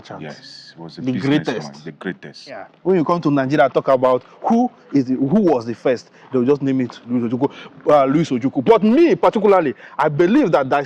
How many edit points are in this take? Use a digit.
1